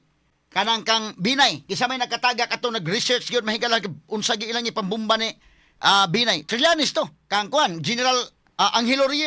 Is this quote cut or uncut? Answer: cut